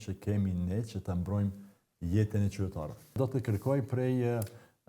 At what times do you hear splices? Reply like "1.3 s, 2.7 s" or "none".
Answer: 3.1 s